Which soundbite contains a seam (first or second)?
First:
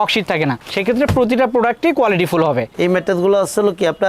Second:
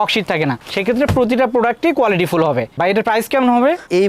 first